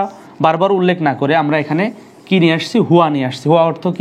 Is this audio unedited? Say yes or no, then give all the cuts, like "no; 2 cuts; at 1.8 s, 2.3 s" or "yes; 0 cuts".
yes; 0 cuts